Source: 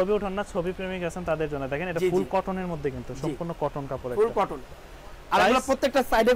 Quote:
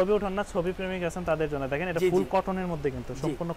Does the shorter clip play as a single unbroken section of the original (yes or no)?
yes